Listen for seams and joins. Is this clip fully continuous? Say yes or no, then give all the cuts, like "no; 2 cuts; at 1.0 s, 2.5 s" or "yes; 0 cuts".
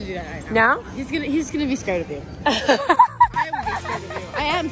yes; 0 cuts